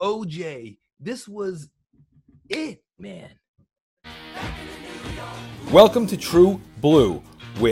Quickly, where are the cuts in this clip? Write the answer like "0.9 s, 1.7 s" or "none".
4.1 s